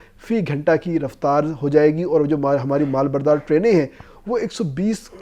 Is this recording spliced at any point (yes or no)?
no